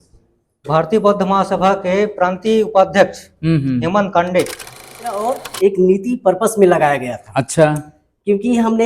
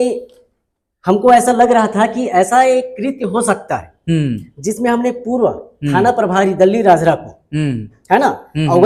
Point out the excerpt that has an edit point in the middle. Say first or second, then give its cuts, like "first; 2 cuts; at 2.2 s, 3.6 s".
first; 1 cut; at 5.0 s